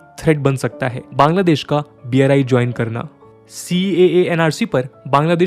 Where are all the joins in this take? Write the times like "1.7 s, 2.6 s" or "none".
1.0 s